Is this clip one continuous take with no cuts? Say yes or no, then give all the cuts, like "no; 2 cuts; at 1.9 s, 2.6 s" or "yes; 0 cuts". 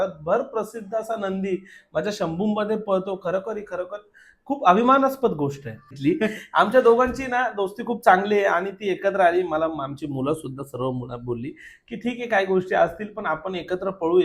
no; 1 cut; at 5.9 s